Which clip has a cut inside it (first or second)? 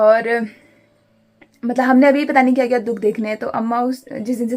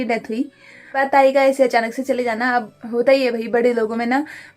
second